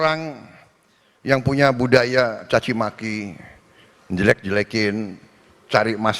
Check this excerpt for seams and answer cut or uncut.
uncut